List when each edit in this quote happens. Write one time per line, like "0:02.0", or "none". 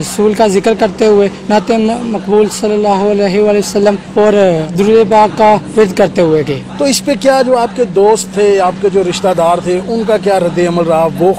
none